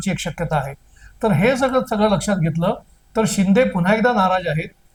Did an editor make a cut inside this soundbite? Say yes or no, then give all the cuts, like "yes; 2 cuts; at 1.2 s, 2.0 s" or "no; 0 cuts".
no; 0 cuts